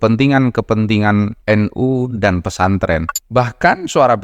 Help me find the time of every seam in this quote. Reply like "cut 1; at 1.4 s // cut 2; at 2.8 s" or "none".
cut 1; at 3.1 s